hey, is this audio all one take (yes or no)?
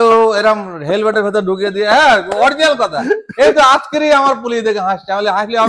yes